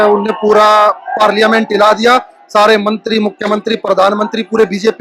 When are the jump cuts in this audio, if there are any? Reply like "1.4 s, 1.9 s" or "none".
none